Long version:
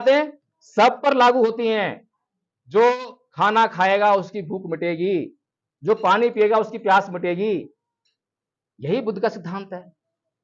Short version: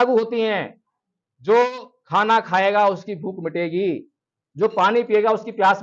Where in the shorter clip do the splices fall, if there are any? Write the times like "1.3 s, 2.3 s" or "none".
none